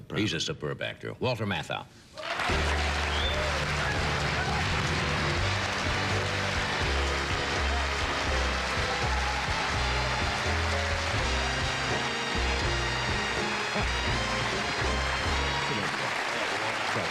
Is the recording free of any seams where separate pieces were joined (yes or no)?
no